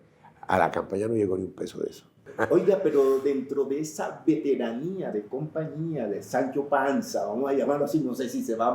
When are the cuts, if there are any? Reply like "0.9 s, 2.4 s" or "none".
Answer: 2.3 s